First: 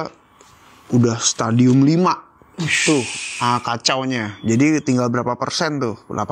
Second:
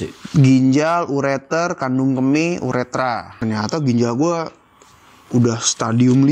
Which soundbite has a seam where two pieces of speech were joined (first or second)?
second